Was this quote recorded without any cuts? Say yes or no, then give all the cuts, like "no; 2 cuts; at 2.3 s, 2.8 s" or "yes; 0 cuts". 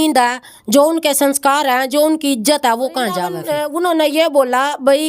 no; 1 cut; at 3.4 s